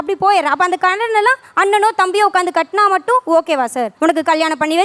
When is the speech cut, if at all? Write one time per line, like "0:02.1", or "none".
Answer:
0:03.9